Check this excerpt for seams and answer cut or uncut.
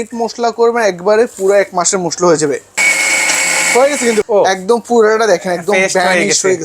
cut